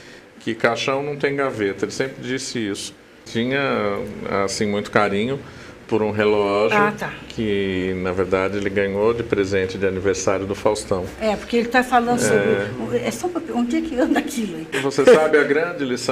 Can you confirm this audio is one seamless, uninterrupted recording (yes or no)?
no